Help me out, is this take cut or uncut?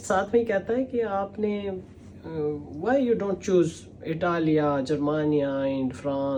uncut